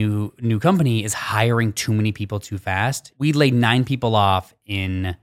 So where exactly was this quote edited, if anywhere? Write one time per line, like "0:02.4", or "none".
0:03.0